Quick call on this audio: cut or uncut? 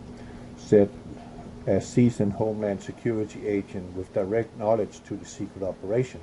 cut